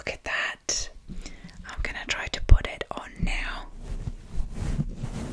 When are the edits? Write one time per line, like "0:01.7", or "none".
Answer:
0:01.1

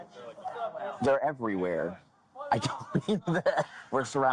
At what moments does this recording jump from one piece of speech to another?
none

